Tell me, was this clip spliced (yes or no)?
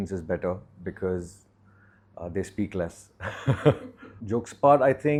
no